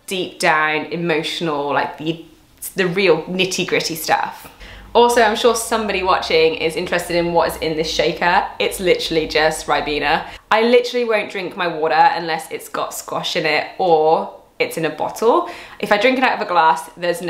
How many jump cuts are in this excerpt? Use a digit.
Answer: 0